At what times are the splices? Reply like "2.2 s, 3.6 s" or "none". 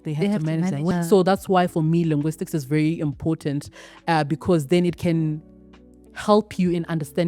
0.9 s